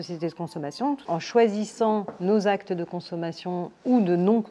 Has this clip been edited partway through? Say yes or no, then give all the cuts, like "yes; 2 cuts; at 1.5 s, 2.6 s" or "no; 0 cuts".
yes; 1 cut; at 1.1 s